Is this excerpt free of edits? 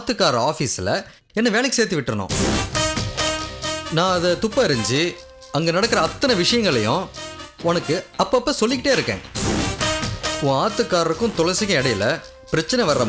yes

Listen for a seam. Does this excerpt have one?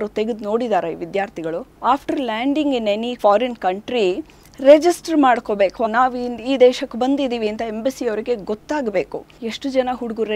yes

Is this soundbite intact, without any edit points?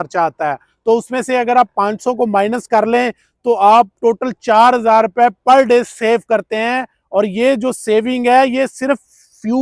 yes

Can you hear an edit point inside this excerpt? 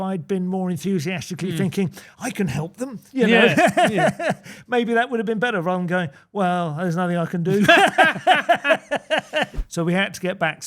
yes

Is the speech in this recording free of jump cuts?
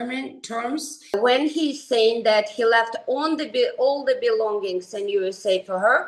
no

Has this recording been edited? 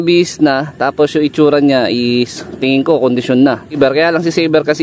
yes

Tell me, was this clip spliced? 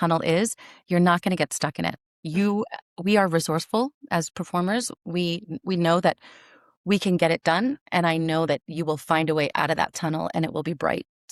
no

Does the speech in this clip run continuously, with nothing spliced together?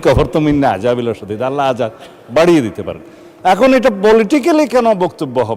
yes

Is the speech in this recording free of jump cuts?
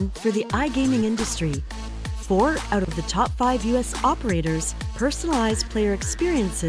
yes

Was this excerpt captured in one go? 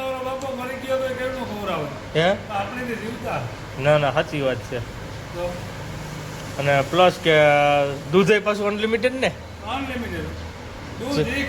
yes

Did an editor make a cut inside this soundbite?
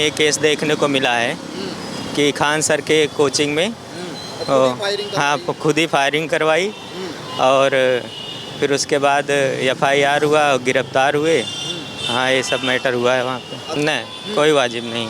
yes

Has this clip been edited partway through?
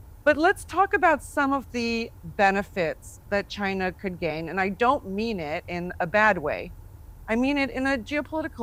no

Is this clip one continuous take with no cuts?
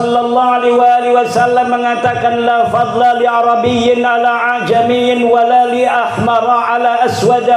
yes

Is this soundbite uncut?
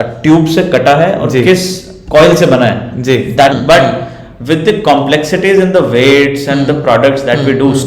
no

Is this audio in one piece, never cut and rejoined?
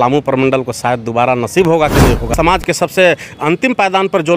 no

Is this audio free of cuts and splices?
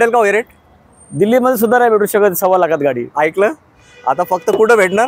yes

